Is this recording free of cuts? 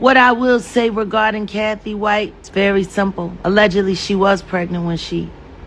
no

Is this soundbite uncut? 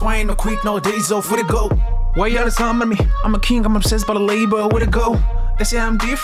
yes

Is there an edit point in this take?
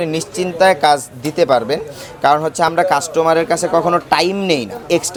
no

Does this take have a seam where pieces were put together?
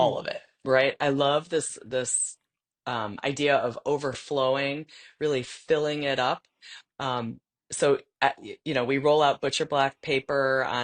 no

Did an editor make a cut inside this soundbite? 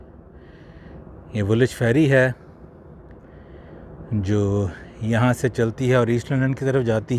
no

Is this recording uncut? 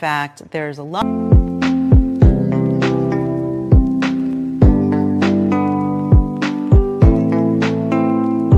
yes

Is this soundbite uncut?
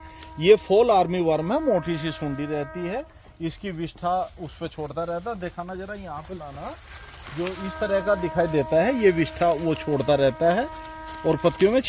yes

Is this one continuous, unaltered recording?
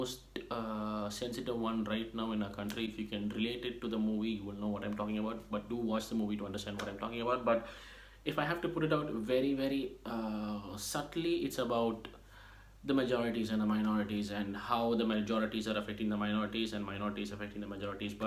yes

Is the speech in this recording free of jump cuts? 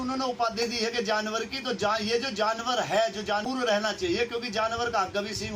no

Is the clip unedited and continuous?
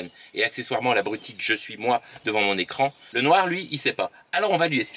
no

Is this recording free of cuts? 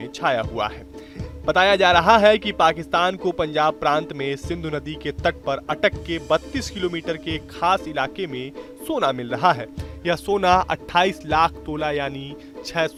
yes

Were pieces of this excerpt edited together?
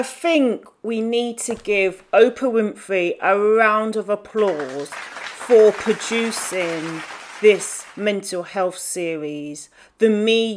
no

